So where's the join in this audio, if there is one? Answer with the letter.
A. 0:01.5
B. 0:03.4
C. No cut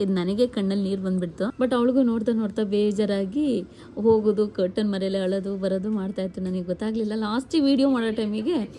A